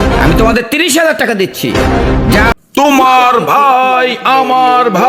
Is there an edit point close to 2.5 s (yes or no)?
yes